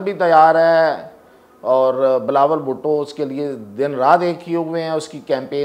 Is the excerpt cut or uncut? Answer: uncut